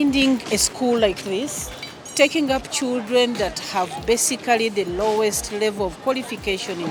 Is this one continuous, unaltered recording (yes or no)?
yes